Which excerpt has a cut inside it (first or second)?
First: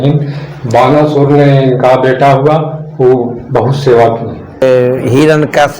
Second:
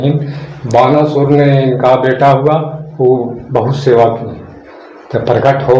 first